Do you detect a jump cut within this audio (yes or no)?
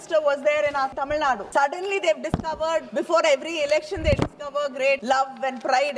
yes